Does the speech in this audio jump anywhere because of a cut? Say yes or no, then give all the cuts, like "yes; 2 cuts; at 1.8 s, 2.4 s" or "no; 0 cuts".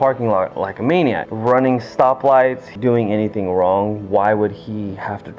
yes; 2 cuts; at 1.2 s, 2.7 s